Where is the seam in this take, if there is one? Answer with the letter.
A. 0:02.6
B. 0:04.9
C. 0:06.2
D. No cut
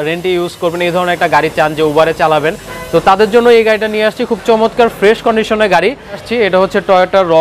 C